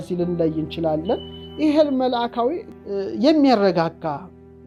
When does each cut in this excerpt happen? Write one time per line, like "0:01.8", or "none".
none